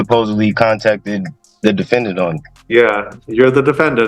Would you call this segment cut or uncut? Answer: cut